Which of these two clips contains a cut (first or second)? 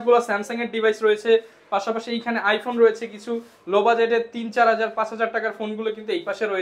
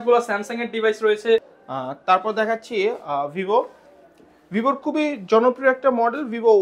second